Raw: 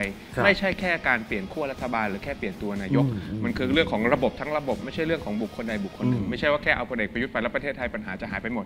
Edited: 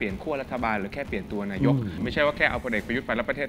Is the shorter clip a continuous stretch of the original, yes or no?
no